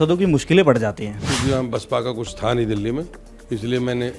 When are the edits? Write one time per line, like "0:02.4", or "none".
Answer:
0:01.3

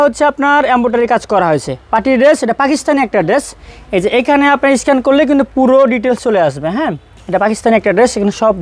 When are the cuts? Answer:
none

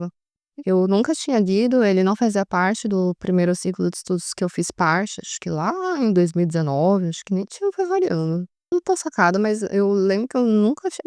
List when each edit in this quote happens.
0:08.7

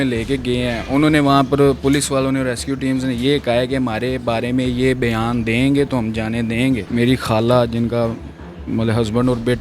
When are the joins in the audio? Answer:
0:06.9

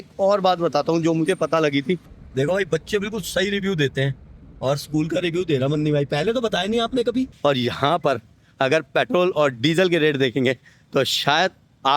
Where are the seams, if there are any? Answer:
0:02.1
0:07.3

